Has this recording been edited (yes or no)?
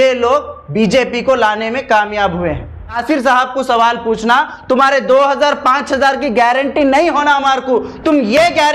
yes